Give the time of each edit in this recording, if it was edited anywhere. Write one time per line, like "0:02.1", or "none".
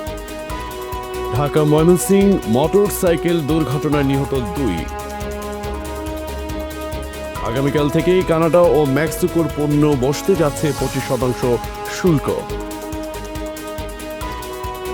0:01.4